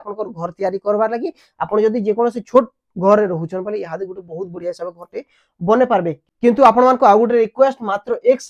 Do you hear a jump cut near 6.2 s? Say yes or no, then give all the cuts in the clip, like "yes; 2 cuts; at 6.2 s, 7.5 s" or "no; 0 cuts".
yes; 1 cut; at 6.2 s